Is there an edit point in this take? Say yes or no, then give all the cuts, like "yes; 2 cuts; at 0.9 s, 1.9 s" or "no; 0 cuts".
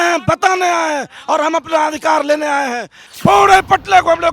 yes; 1 cut; at 3.1 s